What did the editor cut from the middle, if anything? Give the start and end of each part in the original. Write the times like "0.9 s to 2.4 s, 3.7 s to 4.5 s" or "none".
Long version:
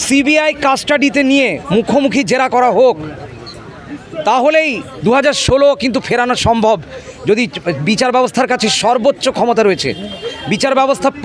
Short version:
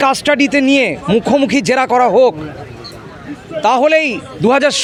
none